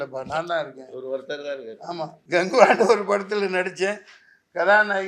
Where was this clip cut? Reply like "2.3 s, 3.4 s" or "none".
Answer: 2.2 s